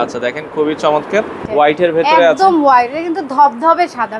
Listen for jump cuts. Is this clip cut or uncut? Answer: cut